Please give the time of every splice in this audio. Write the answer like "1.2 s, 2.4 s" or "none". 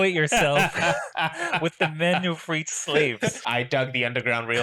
3.4 s